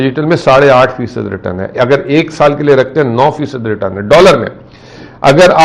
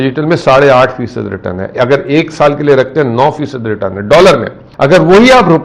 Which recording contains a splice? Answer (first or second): second